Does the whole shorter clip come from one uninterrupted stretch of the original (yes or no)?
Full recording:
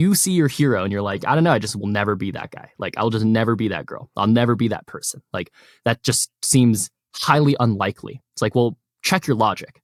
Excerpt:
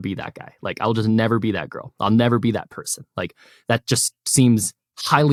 yes